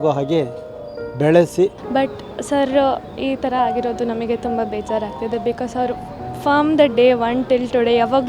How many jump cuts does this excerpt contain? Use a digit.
1